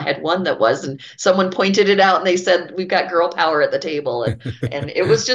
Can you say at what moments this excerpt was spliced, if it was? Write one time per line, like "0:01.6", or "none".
none